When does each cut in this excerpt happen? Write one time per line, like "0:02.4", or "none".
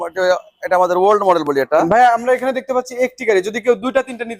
0:01.8

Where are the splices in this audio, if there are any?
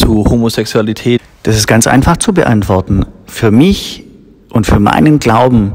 0:01.2

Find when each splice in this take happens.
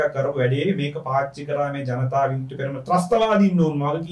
none

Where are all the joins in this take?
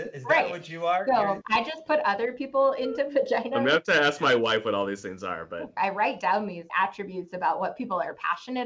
0:01.4
0:05.7

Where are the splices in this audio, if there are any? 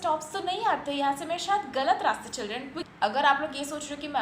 0:02.8

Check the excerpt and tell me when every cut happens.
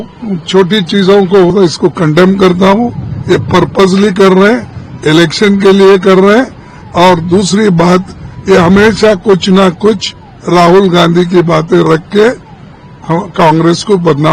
0:01.5

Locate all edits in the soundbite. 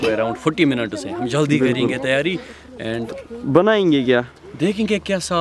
none

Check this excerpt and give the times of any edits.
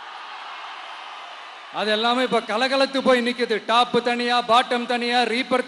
none

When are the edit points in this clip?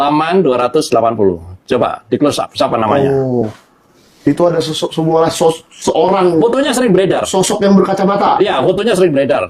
none

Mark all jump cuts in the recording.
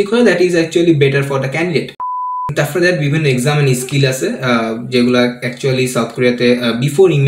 0:02.4

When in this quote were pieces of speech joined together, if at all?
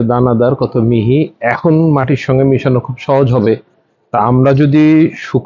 none

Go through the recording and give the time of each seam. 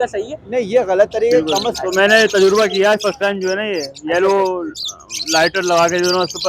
0:01.6

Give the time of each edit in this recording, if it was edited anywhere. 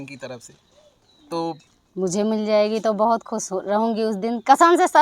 0:01.7

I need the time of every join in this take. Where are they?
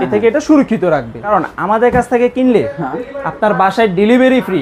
0:01.1

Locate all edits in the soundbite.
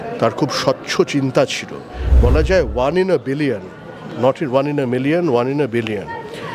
0:02.0

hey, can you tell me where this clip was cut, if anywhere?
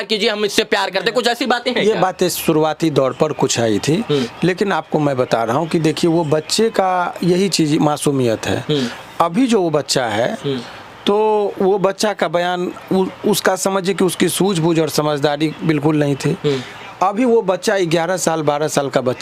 none

